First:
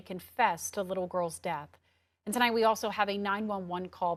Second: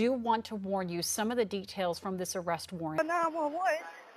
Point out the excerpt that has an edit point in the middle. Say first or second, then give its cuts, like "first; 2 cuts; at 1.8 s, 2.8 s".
second; 1 cut; at 3.0 s